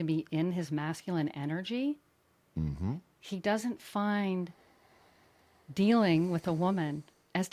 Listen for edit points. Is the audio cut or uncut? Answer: uncut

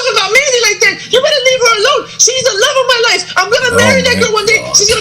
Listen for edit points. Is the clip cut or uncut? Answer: uncut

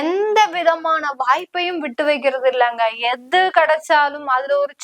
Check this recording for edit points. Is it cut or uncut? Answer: uncut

